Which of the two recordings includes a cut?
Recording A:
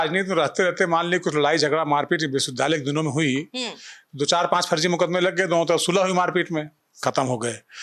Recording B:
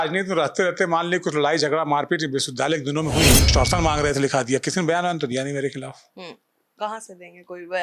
B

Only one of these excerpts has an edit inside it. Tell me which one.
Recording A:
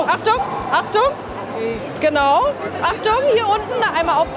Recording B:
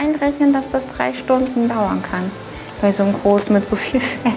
A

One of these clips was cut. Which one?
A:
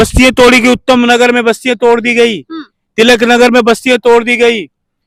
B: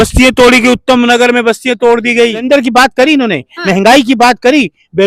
B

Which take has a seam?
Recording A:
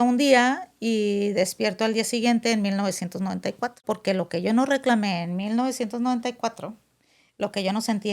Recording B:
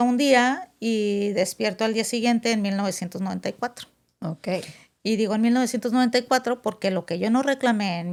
A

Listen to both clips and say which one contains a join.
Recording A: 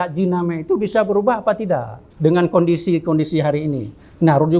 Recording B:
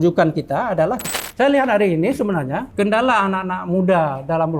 B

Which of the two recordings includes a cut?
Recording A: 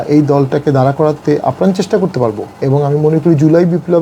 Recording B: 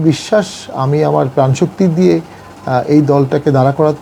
A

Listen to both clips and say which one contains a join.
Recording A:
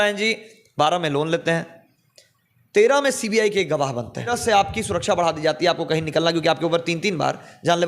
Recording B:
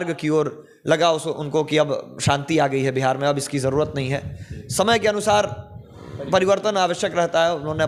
A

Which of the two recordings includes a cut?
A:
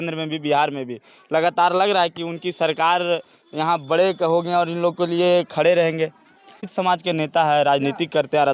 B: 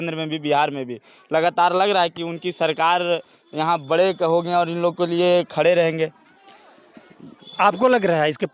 A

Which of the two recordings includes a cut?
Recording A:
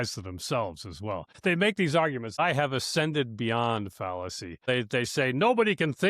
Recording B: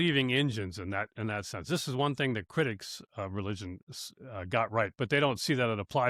A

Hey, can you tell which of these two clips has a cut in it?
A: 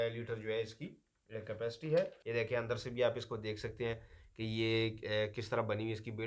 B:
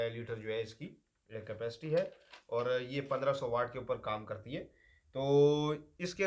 A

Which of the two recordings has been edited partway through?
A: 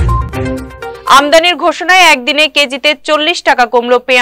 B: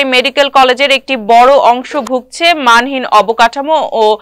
A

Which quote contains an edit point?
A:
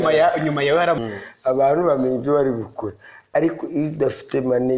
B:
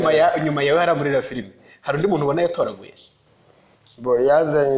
A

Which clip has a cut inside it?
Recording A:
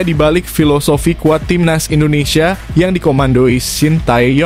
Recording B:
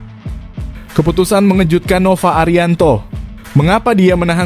B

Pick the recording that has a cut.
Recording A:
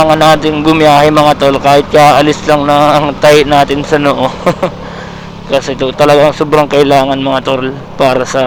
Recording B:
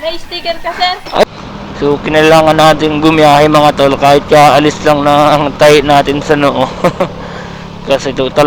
B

